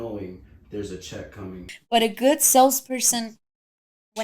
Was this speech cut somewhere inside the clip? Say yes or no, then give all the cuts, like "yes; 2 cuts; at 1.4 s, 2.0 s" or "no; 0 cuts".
yes; 1 cut; at 1.6 s